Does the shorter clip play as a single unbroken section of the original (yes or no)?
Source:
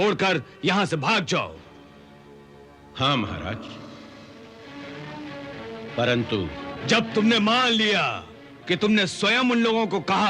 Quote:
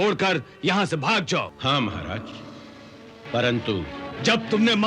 no